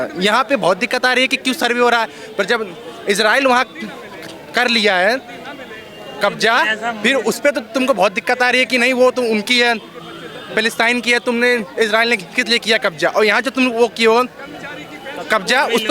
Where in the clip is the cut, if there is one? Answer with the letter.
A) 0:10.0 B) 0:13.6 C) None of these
C